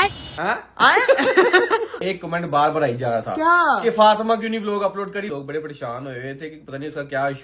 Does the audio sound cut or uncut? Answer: cut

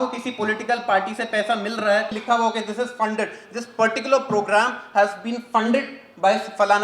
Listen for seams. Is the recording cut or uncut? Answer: cut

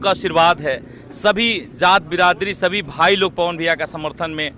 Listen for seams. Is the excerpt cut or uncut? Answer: uncut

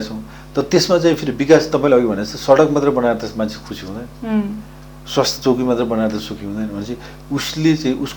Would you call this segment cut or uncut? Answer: uncut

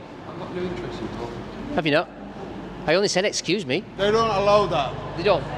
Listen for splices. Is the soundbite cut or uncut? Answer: cut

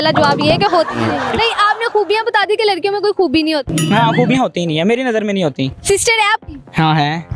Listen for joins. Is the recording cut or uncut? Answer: cut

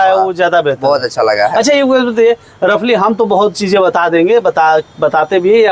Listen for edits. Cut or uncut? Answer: uncut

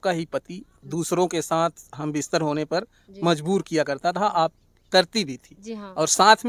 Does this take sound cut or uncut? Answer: uncut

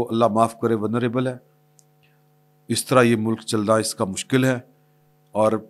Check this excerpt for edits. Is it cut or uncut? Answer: uncut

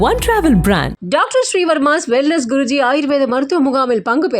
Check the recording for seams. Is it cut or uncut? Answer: uncut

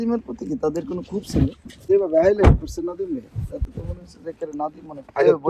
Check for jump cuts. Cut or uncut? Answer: cut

